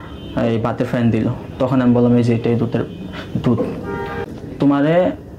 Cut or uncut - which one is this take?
cut